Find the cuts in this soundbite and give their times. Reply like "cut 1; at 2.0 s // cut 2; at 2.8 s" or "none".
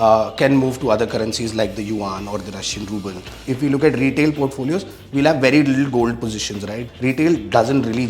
cut 1; at 3.4 s // cut 2; at 6.8 s